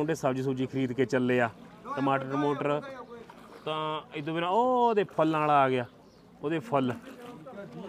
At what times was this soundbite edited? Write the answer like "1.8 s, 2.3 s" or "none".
none